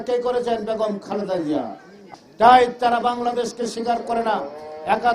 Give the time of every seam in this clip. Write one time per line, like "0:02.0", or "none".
0:02.0